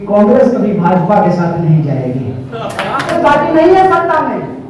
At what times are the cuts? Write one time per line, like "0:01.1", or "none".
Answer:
0:03.1